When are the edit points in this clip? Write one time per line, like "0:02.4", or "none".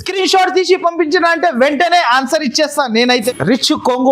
0:03.1

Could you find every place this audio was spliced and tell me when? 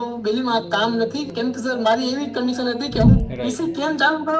0:01.3
0:03.2

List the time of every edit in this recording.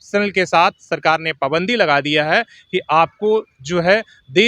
none

